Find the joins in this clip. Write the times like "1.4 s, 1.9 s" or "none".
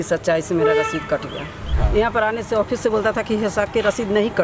1.8 s